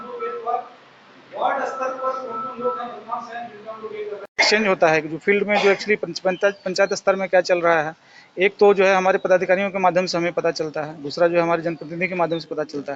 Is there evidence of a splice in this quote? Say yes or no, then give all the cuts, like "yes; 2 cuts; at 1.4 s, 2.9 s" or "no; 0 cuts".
yes; 1 cut; at 4.4 s